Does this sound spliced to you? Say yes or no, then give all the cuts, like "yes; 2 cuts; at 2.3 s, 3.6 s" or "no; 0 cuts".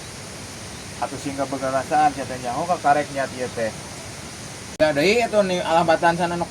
yes; 1 cut; at 4.8 s